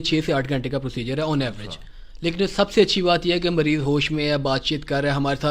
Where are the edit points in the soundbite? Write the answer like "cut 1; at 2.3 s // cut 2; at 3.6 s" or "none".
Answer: none